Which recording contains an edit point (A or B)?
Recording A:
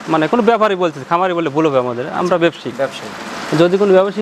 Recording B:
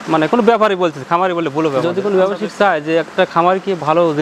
B